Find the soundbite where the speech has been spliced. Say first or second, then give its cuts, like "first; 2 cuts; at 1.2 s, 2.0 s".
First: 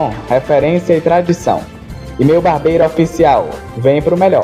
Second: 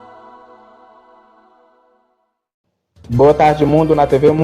second; 1 cut; at 2.8 s